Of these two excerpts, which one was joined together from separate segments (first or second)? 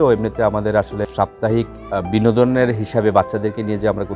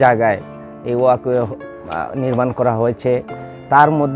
first